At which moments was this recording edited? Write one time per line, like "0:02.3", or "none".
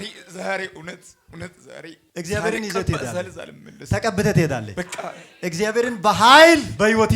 0:02.0